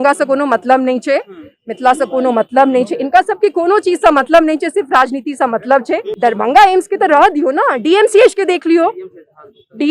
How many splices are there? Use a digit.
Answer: 1